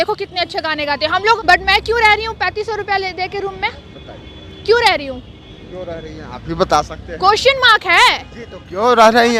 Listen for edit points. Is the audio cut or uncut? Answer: cut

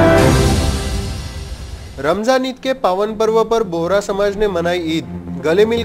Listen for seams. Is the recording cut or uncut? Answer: uncut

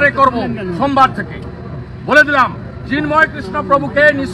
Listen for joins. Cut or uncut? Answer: uncut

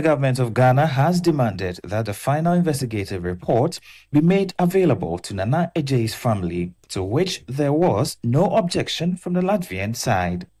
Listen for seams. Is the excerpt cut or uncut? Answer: uncut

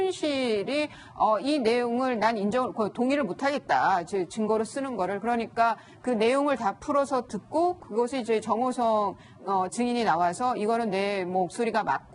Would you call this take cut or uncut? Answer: cut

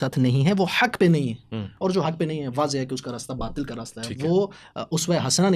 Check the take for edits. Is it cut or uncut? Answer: uncut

